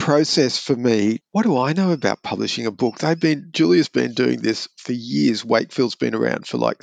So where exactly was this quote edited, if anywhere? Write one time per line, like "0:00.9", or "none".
0:01.2